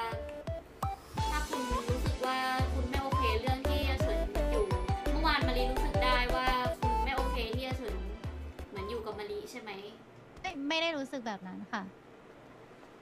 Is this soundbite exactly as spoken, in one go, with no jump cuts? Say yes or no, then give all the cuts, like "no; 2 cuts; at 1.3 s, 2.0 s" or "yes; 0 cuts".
yes; 0 cuts